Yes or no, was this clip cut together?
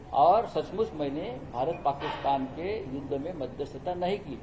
no